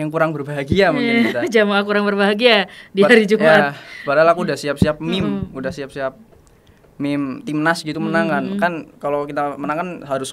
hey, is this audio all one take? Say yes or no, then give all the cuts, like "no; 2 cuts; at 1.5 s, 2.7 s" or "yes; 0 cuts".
yes; 0 cuts